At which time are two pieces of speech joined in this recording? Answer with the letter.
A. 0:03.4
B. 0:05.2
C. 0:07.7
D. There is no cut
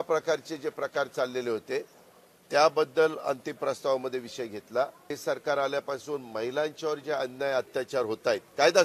B